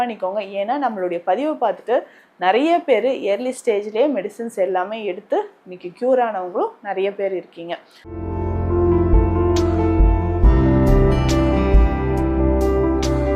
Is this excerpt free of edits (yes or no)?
no